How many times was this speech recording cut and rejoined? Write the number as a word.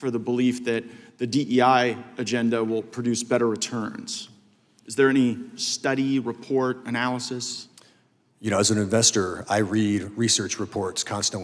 zero